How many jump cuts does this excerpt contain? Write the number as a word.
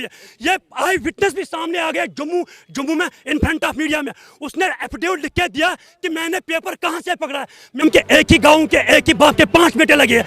one